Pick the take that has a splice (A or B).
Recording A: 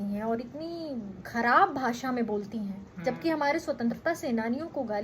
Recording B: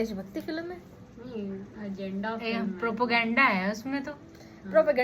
A